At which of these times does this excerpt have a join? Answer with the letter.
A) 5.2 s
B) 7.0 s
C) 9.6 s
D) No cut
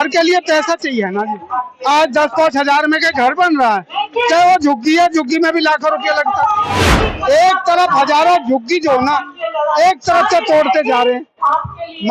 B